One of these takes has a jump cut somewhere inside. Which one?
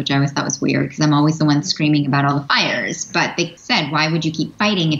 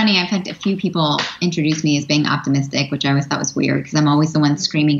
first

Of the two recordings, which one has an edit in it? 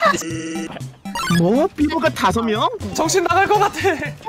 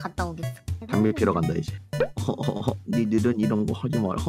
second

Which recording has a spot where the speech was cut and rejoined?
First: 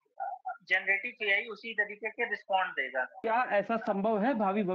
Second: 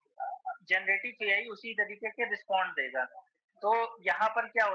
first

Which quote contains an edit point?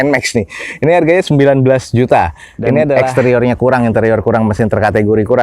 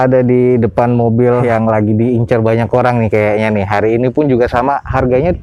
first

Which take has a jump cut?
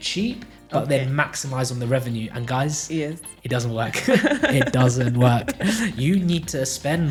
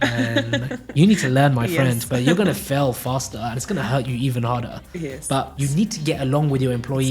second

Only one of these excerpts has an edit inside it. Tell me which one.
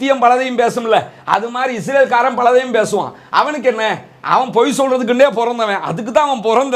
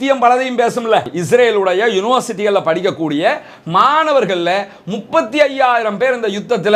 second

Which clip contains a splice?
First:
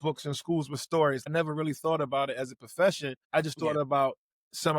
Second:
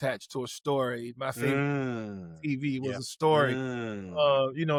first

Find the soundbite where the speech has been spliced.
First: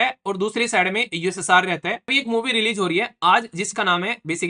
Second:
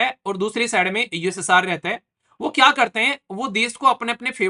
first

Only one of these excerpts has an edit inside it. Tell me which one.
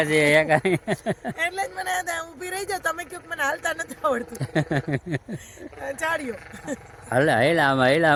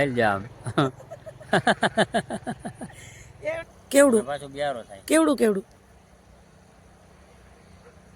second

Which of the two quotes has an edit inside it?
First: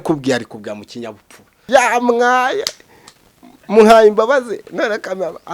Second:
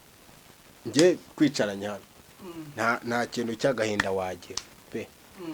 first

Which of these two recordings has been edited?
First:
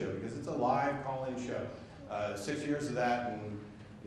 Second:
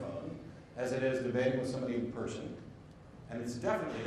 first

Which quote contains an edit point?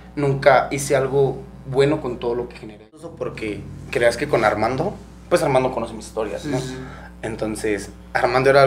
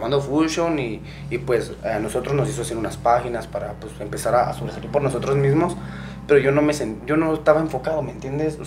first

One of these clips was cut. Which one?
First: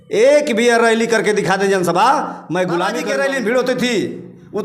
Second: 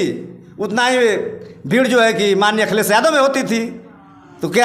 first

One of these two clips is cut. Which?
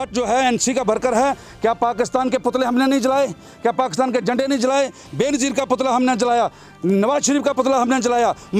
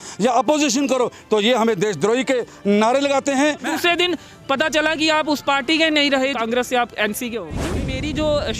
second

